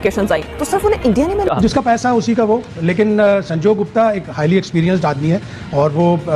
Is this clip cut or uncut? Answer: cut